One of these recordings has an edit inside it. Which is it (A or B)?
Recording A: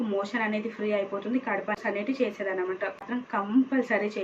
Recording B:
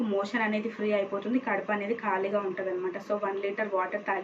A